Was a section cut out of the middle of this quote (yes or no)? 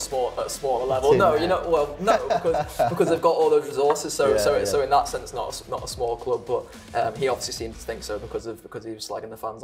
no